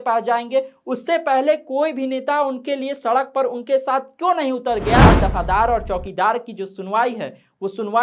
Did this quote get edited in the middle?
yes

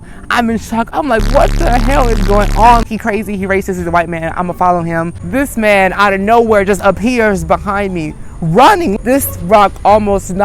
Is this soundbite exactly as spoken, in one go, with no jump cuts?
no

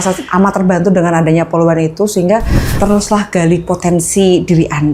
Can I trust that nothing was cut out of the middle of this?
no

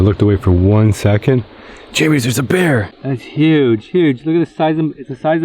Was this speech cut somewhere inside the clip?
yes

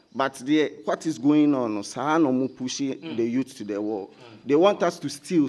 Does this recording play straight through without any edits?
yes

